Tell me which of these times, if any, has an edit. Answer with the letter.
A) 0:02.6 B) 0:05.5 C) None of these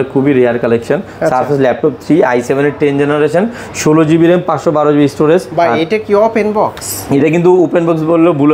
B